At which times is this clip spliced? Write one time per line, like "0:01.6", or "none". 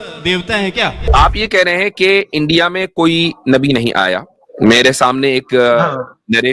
0:01.0